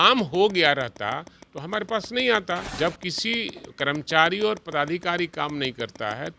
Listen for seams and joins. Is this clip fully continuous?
no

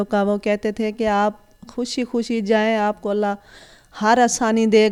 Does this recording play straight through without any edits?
yes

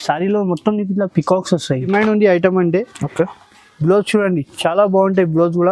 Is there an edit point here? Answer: yes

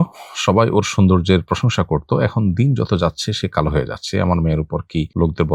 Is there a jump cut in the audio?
no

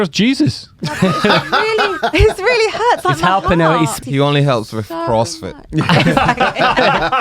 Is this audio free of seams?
no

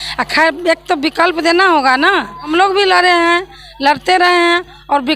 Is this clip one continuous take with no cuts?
no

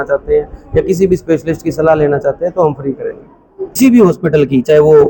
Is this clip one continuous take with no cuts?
no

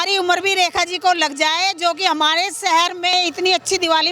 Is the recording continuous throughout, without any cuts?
no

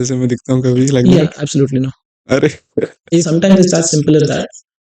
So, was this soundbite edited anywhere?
yes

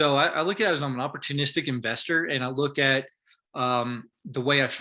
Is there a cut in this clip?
no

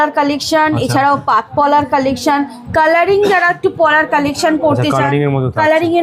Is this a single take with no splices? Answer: yes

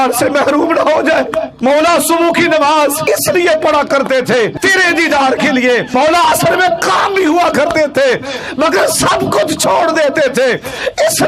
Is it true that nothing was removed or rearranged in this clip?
no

